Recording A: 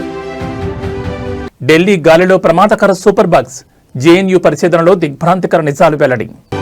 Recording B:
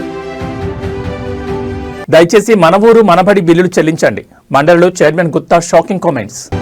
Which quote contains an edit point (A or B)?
A